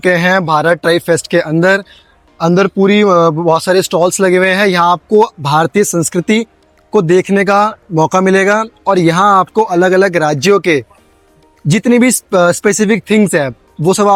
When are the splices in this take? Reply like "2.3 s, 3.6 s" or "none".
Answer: none